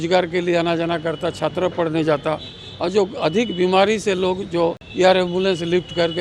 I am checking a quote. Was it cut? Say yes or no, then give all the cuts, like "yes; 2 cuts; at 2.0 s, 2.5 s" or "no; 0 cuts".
no; 0 cuts